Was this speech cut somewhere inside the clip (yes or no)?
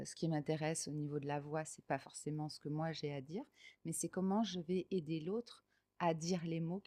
no